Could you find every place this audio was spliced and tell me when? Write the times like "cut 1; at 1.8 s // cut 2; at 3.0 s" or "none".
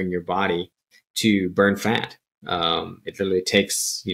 none